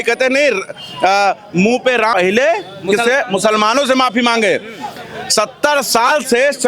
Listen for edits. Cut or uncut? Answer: cut